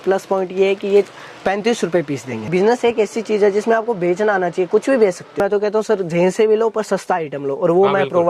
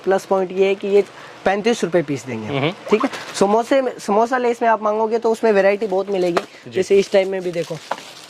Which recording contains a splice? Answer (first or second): first